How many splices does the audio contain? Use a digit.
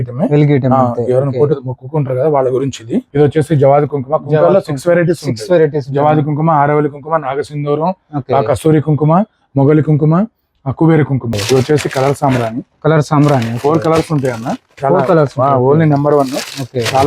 2